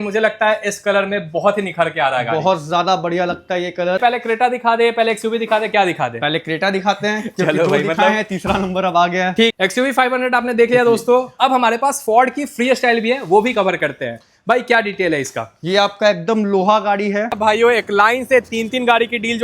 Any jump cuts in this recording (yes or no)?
yes